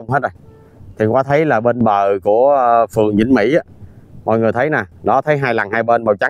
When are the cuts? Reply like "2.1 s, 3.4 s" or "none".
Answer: none